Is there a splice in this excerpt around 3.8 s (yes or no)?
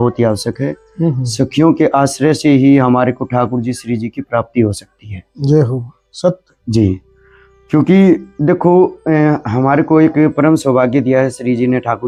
no